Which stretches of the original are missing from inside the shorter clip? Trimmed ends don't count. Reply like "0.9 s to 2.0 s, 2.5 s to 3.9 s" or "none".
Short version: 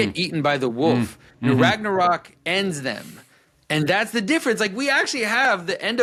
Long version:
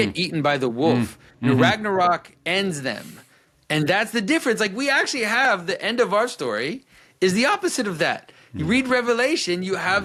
none